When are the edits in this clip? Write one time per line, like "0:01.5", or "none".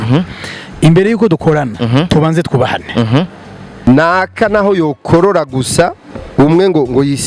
0:03.6